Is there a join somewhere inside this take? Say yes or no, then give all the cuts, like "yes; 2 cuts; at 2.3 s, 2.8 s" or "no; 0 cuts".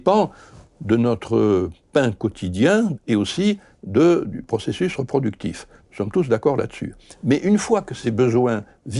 yes; 2 cuts; at 3.0 s, 8.0 s